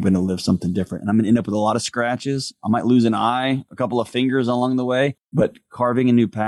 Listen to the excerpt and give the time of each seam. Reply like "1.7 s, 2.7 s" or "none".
5.2 s

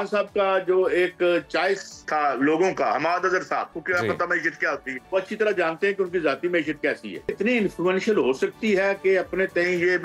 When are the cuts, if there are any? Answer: 1.9 s, 3.7 s, 4.9 s, 7.3 s

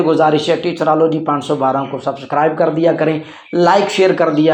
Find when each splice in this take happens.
none

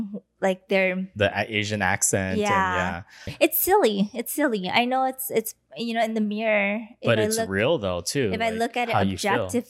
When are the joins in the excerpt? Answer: 3.3 s

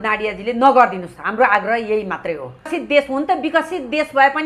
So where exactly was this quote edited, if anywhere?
2.8 s

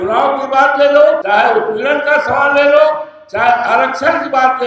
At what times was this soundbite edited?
1.2 s

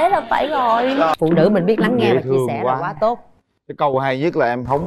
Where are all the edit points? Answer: 1.1 s

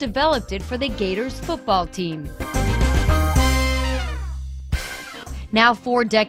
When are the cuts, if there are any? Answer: 2.4 s

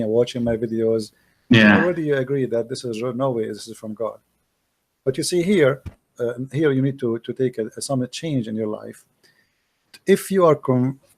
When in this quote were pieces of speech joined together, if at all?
6.0 s

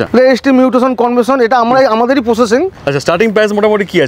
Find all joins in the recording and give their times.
2.7 s

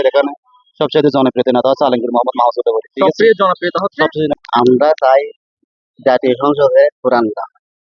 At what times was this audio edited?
4.3 s

